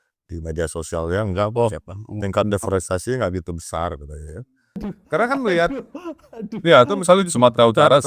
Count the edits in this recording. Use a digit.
1